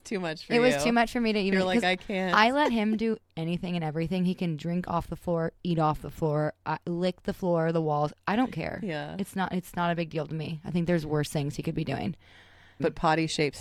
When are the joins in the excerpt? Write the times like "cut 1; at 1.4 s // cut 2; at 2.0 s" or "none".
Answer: none